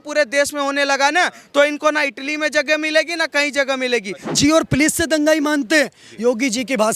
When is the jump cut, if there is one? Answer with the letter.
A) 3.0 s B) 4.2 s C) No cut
B